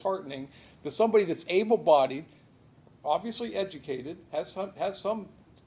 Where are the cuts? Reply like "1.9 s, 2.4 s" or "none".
none